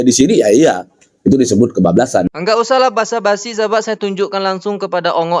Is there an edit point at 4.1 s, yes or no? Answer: no